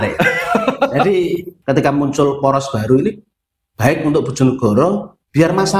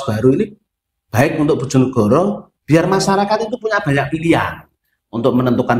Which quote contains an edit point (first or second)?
first